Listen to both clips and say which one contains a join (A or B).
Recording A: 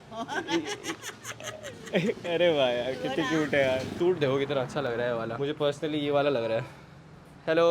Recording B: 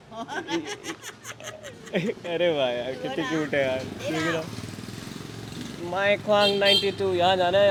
A